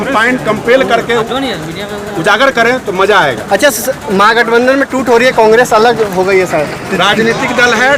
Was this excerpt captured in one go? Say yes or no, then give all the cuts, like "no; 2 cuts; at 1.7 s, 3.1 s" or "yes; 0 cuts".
yes; 0 cuts